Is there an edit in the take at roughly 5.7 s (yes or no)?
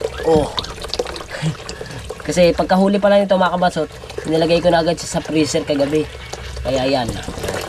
no